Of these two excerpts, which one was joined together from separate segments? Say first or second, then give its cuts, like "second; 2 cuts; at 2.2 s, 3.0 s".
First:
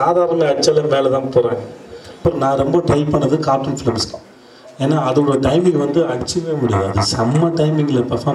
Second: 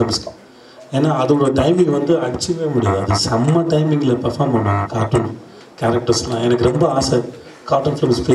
first; 1 cut; at 2.2 s